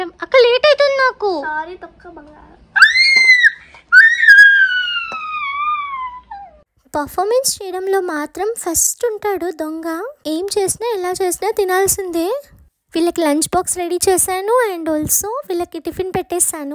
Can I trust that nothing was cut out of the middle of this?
yes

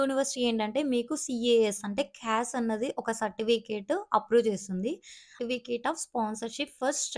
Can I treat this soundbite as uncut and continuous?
no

